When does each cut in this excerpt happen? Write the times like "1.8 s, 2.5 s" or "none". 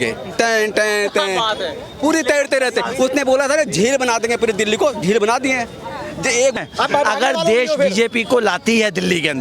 6.5 s